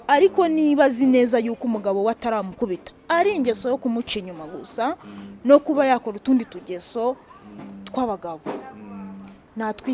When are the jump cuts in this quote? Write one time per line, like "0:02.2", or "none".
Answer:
none